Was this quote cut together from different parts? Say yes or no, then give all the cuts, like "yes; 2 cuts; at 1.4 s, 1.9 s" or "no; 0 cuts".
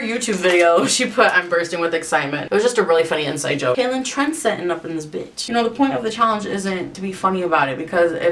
yes; 3 cuts; at 3.8 s, 5.4 s, 6.9 s